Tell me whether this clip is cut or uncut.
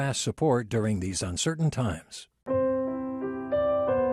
cut